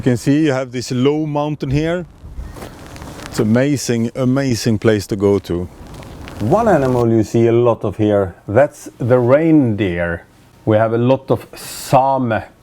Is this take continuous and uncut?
no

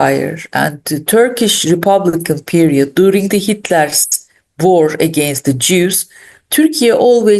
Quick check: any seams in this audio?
no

